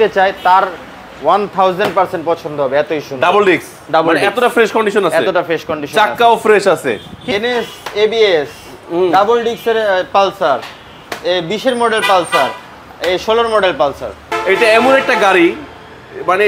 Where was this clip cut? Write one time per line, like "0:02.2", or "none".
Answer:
0:07.3
0:14.2